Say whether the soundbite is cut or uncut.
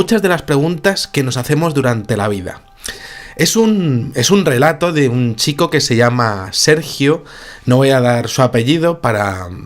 cut